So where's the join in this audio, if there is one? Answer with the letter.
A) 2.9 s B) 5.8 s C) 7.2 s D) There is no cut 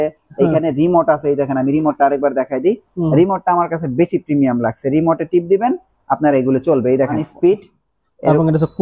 C